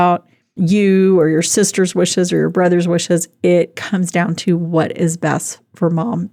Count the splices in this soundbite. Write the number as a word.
zero